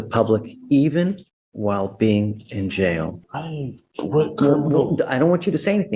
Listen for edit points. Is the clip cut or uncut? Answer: cut